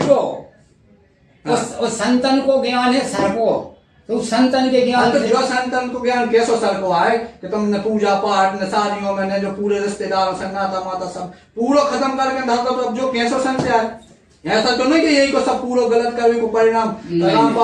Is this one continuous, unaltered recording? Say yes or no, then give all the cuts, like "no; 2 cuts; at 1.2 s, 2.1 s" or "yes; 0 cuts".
yes; 0 cuts